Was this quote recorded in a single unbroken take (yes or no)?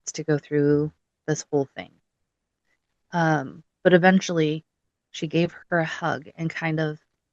yes